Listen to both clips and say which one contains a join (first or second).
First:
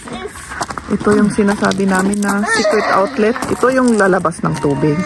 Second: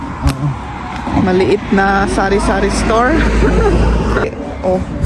second